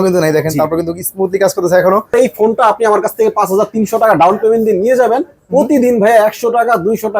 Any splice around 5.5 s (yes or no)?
no